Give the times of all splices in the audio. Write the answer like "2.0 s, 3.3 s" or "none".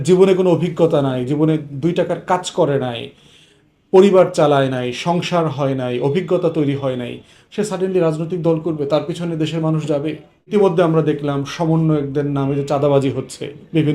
10.5 s